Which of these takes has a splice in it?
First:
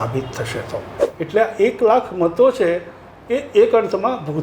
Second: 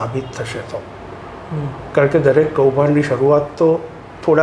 first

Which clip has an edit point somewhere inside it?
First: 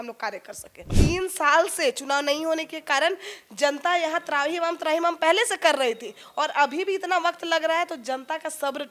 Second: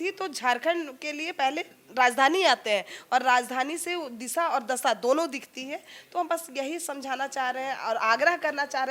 first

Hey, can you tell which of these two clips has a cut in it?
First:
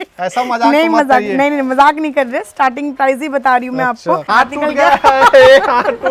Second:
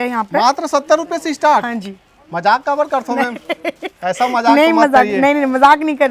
first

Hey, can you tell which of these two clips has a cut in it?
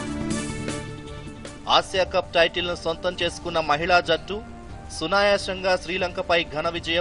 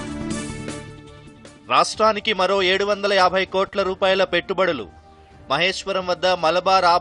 first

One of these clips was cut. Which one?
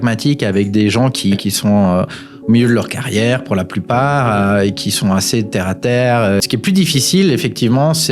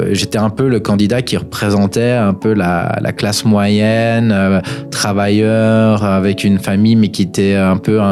first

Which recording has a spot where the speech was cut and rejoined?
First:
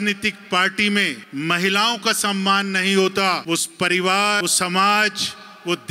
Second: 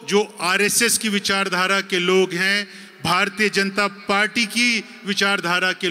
first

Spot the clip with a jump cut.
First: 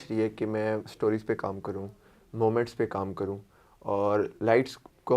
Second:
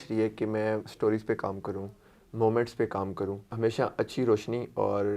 second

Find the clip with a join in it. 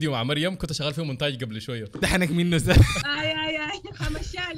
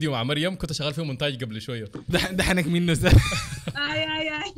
first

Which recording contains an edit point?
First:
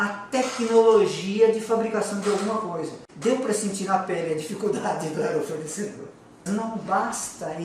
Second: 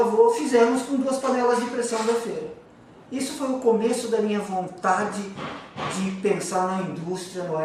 first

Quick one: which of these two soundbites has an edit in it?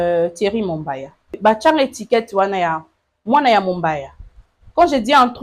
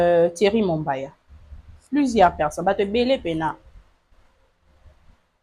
first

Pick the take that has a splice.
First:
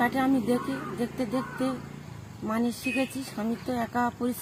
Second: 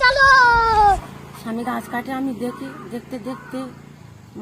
second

